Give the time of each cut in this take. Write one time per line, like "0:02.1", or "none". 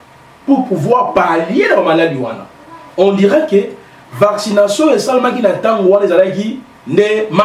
none